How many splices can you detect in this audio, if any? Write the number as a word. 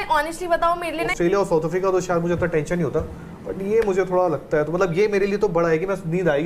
one